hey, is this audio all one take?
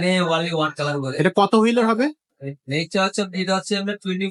yes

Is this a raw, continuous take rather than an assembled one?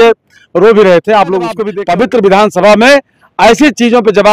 no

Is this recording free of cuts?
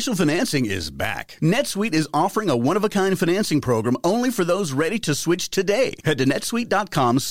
yes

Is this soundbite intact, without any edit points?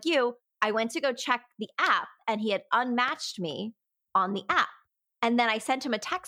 yes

